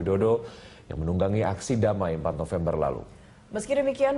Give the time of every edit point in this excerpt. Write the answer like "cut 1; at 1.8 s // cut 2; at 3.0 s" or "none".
cut 1; at 1.0 s

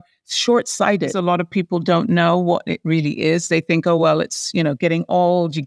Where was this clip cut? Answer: cut 1; at 1.2 s

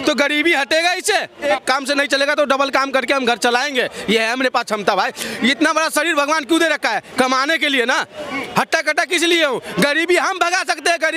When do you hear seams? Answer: cut 1; at 1.5 s

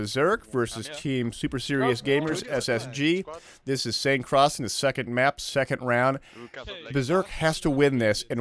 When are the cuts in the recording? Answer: none

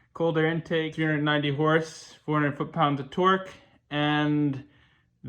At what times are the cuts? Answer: cut 1; at 0.9 s

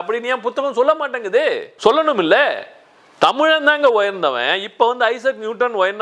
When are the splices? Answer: none

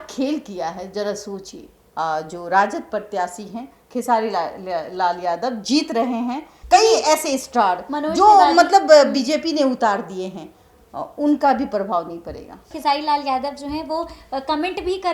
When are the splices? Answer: cut 1; at 1.8 s // cut 2; at 6.5 s // cut 3; at 12.7 s

